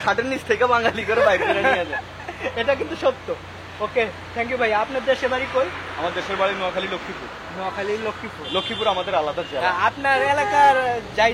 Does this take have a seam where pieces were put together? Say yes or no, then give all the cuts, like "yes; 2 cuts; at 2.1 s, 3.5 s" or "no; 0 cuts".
no; 0 cuts